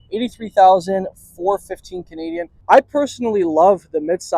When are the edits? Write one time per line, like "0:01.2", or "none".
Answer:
0:02.5